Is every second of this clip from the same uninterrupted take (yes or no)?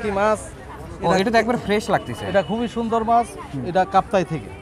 yes